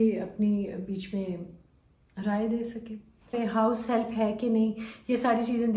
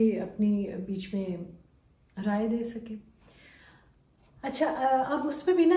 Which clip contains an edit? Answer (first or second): first